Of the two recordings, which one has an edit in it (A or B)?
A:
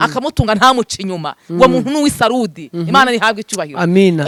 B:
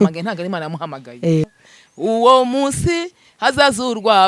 B